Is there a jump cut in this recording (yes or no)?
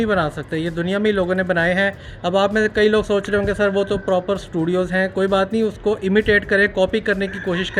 no